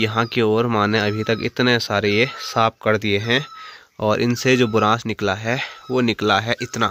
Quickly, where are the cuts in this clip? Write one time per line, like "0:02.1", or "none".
none

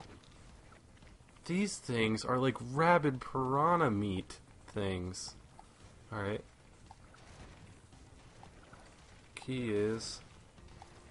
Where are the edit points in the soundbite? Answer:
none

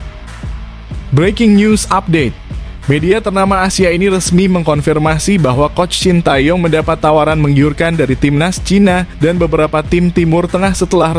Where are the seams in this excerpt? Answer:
0:01.1

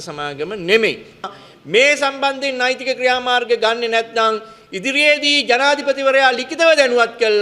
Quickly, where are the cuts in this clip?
0:01.3

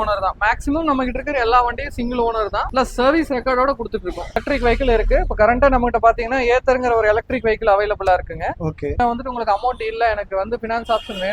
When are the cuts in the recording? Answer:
0:04.4
0:08.9

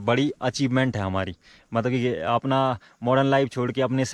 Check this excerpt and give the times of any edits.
none

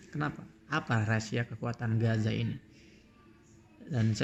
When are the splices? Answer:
none

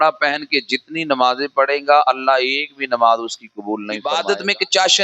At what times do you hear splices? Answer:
0:03.9

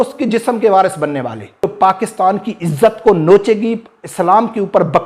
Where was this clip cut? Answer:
0:01.7

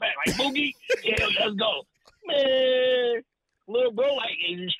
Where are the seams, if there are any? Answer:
none

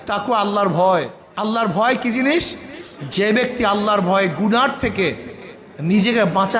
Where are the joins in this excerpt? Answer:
0:01.2

